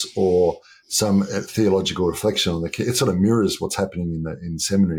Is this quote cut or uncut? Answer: uncut